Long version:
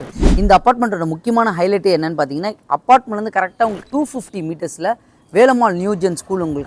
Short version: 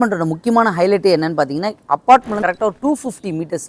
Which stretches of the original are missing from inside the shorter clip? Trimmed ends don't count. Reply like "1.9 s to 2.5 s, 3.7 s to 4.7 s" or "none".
3.4 s to 3.7 s